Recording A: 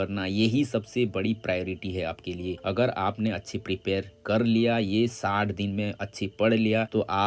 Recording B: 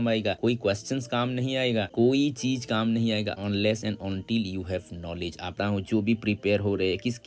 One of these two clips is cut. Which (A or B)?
B